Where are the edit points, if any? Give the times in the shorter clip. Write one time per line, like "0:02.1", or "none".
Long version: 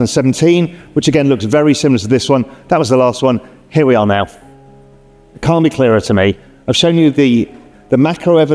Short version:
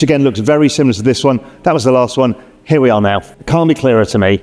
0:03.3